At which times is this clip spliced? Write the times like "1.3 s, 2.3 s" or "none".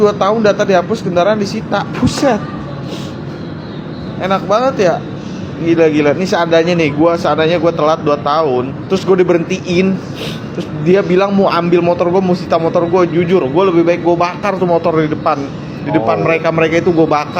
none